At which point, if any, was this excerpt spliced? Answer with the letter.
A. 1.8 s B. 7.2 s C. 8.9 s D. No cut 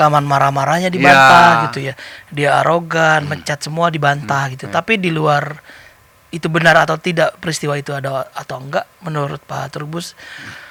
D